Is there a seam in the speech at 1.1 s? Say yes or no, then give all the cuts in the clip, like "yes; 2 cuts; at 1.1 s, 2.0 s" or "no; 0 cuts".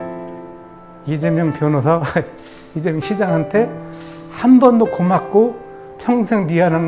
yes; 1 cut; at 1.1 s